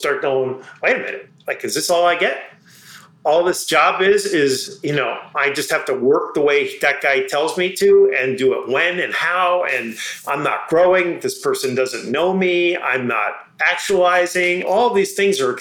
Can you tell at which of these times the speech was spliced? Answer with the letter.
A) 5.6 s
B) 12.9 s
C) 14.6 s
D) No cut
C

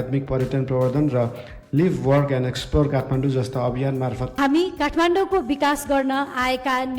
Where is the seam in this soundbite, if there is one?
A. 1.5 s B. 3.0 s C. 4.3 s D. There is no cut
C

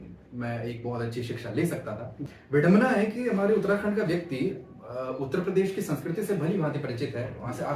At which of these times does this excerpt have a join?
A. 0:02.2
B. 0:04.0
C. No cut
A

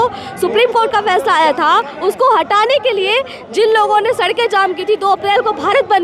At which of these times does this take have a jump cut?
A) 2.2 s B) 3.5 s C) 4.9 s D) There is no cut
D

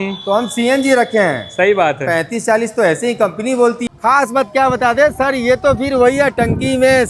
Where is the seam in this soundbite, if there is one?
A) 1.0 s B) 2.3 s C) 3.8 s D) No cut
C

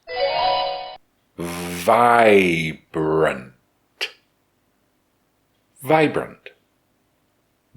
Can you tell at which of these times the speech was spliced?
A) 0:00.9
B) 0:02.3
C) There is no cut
A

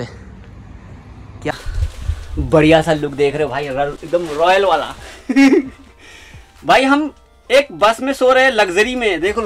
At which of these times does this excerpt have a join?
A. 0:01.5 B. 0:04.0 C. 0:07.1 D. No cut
A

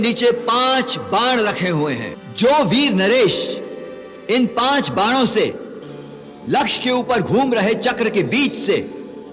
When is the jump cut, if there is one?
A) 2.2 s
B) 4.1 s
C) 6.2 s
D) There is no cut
A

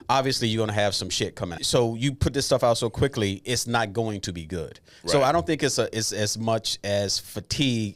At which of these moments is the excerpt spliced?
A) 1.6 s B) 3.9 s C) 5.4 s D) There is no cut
A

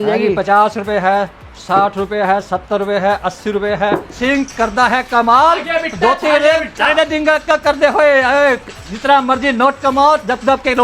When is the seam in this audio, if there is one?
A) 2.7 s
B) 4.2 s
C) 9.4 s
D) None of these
B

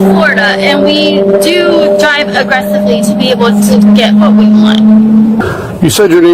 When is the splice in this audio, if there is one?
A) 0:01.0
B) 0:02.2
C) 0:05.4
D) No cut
C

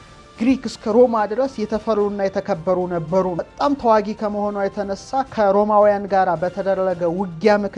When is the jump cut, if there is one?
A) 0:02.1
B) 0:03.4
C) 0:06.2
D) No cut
B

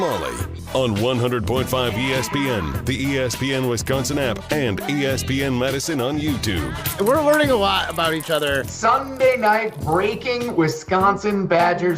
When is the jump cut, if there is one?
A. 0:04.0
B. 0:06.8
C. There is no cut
B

